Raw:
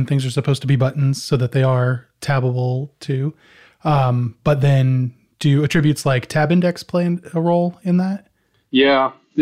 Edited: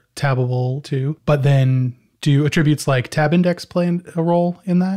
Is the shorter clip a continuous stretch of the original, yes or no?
no